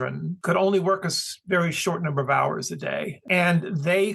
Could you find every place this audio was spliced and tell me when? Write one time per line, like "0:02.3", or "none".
0:02.9